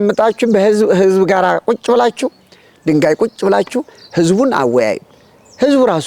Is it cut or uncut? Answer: cut